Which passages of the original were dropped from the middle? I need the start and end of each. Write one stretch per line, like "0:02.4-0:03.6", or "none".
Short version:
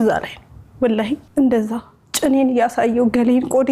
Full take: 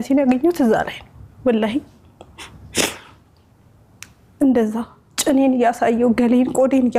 0:01.9-0:04.3

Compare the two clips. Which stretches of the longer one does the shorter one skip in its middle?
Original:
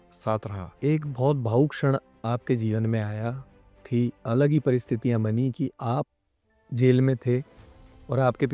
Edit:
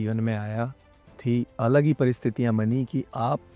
none

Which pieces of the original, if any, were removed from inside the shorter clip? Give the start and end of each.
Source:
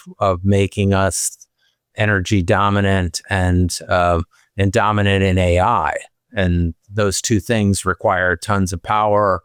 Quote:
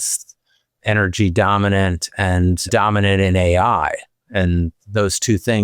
0:03.8-0:04.7

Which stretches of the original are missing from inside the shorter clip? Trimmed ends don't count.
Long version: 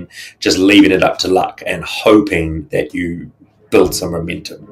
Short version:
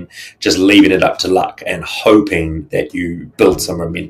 0:03.2-0:03.5

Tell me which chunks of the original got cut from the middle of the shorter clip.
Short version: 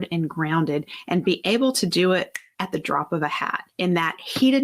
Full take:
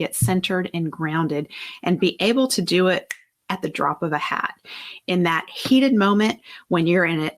0:01.6-0:01.7
0:03.2-0:03.3
0:04.5-0:04.9

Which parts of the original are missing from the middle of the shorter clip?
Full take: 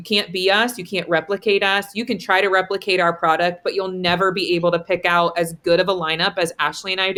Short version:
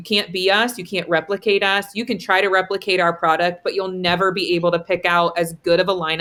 none

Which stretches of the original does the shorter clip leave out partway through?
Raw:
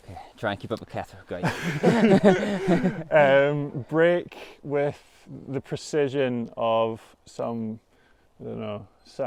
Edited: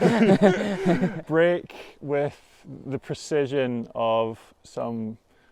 0:03.0-0:03.8

